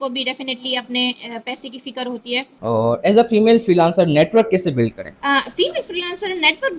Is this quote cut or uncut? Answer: cut